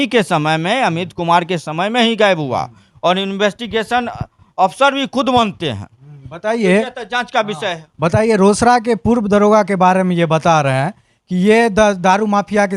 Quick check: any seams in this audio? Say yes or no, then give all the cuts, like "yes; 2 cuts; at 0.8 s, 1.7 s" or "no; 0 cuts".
no; 0 cuts